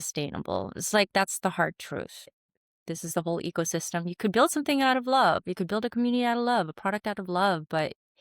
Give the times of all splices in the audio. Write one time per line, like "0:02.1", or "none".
0:02.4